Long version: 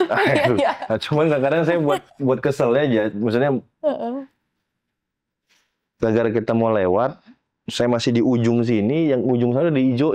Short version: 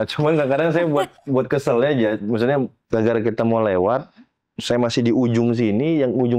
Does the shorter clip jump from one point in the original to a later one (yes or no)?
yes